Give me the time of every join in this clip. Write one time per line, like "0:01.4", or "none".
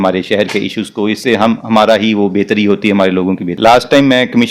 0:03.5